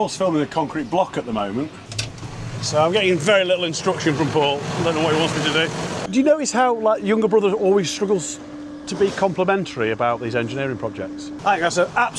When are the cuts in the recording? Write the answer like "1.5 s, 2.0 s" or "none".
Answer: 1.8 s, 6.0 s, 11.3 s

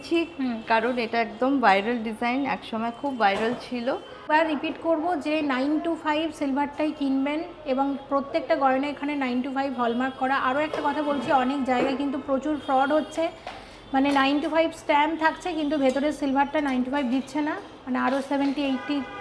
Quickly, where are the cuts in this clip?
4.2 s

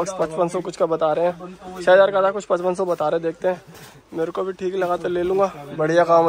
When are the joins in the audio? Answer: none

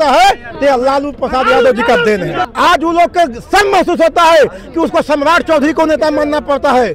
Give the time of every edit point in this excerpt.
2.4 s

